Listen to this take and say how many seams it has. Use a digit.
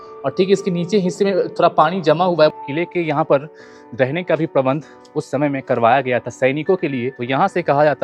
2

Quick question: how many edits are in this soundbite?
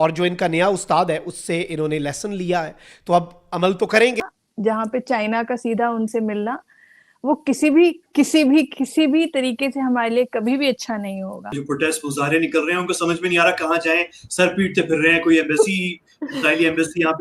2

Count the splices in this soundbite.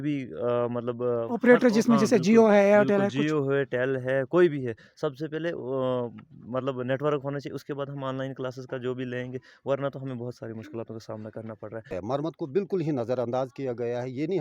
1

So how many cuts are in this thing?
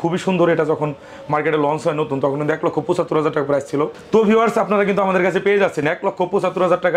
0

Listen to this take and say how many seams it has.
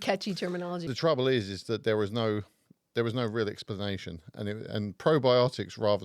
1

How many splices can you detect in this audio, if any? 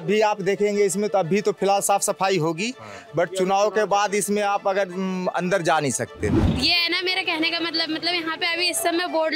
1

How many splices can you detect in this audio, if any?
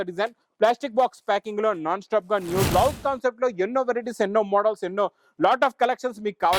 1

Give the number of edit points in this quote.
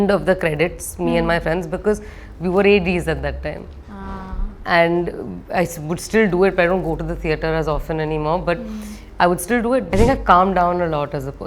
1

